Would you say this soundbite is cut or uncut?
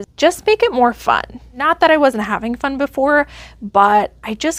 uncut